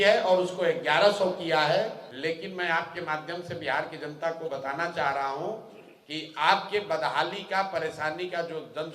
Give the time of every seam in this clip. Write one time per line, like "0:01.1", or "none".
0:02.1